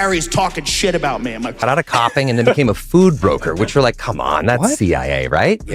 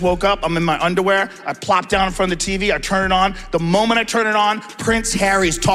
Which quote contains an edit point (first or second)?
first